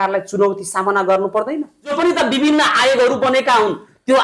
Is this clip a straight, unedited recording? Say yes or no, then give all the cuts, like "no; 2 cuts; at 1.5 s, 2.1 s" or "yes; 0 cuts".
no; 1 cut; at 1.9 s